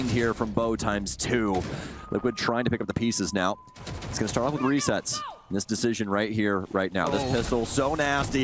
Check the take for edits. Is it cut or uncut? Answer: cut